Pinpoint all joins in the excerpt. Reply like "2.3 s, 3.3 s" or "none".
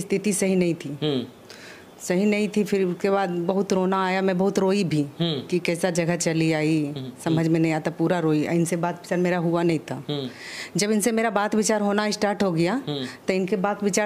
none